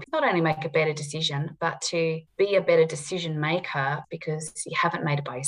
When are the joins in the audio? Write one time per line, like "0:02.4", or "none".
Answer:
0:04.0